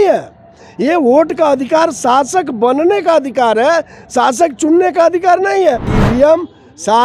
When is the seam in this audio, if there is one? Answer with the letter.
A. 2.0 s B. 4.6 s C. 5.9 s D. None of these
C